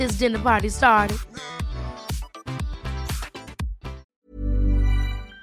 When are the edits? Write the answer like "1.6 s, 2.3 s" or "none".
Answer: 4.1 s